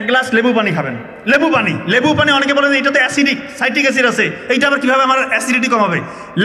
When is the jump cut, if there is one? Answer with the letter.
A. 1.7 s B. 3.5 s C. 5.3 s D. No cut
D